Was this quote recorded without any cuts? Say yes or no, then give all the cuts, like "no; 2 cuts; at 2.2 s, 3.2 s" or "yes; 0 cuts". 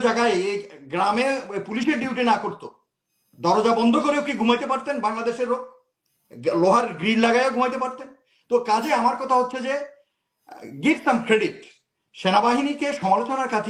yes; 0 cuts